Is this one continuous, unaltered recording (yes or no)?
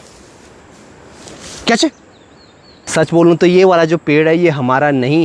yes